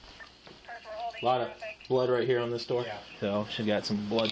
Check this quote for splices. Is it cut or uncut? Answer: cut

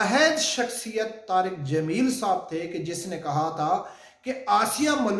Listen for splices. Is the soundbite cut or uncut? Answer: uncut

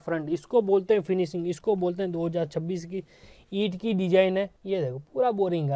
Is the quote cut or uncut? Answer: uncut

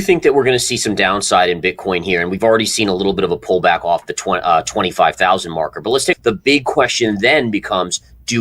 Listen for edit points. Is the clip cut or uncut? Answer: cut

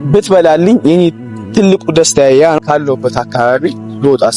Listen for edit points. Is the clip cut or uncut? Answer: cut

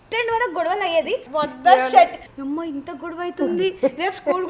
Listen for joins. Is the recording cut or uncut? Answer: cut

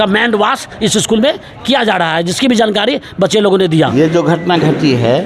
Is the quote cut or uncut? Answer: cut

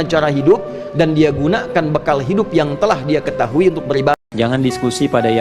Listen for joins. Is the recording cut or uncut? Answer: cut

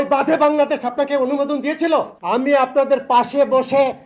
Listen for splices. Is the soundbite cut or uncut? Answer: cut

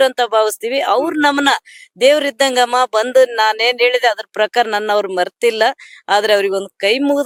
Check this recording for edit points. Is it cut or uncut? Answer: uncut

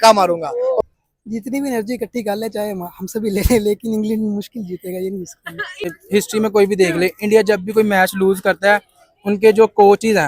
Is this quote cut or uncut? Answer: cut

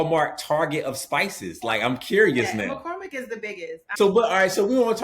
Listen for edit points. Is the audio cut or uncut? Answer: cut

